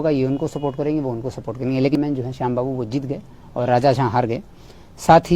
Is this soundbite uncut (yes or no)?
no